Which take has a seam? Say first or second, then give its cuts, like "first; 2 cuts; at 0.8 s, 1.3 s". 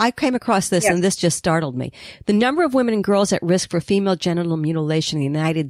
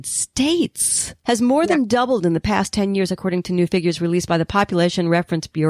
second; 1 cut; at 1.2 s